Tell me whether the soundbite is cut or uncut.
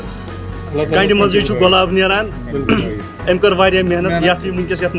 uncut